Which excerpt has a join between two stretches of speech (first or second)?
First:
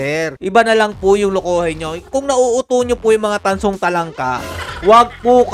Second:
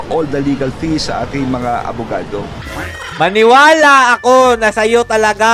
second